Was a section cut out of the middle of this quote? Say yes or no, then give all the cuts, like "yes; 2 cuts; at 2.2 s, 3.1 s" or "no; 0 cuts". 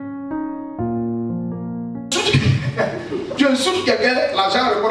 no; 0 cuts